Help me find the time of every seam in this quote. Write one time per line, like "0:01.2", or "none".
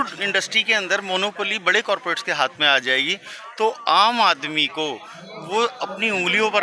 none